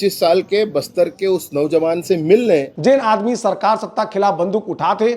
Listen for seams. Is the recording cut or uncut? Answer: cut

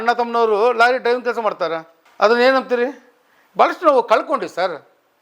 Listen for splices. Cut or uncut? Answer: uncut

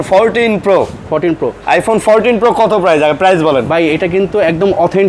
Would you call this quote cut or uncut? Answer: uncut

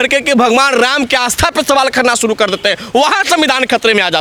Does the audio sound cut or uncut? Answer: uncut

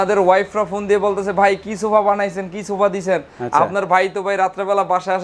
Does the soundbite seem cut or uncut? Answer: uncut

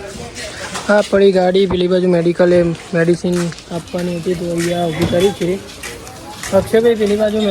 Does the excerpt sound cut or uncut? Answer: uncut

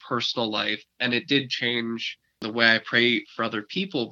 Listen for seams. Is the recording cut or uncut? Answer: cut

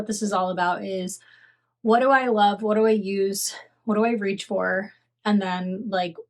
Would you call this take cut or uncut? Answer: uncut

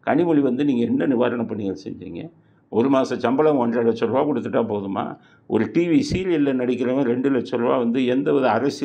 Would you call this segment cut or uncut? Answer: uncut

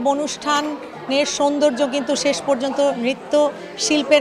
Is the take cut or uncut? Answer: uncut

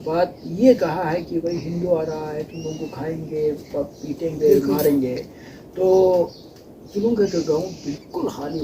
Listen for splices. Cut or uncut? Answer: uncut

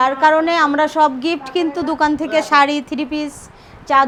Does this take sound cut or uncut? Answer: uncut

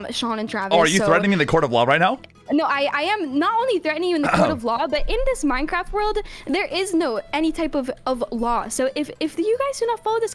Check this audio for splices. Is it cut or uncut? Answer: uncut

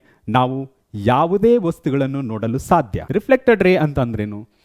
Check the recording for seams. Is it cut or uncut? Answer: cut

